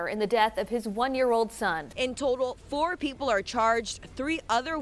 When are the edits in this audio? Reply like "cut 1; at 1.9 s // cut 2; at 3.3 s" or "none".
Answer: none

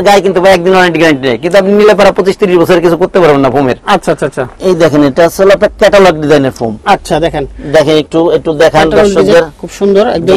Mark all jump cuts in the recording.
none

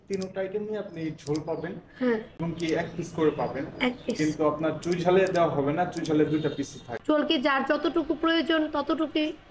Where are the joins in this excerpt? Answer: cut 1; at 2.3 s // cut 2; at 6.9 s

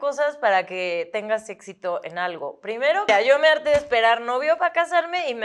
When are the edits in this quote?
cut 1; at 3.1 s

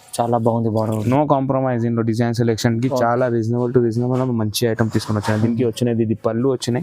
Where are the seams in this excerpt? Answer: cut 1; at 1.0 s

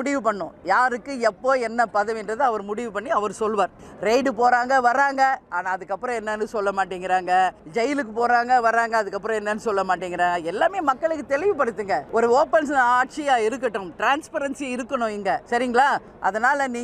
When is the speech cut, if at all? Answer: cut 1; at 3.9 s // cut 2; at 7.6 s // cut 3; at 12.1 s // cut 4; at 15.4 s

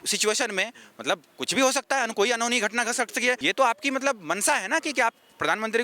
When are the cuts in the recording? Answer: cut 1; at 3.4 s

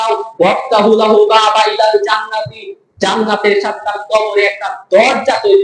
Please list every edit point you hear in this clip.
none

